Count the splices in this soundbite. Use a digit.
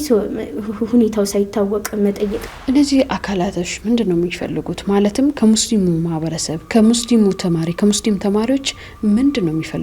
1